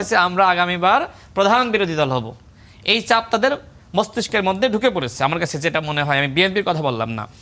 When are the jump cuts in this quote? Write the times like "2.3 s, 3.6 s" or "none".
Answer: none